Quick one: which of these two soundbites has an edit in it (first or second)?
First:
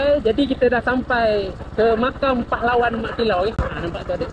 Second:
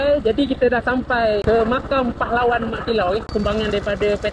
second